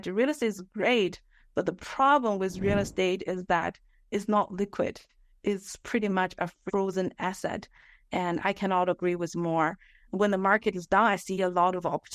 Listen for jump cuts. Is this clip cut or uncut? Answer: uncut